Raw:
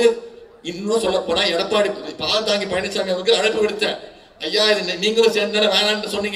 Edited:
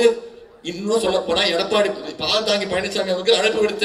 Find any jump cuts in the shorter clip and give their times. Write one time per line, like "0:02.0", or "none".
none